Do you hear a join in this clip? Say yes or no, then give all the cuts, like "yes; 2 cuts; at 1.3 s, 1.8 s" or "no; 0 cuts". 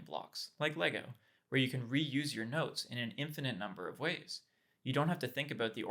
no; 0 cuts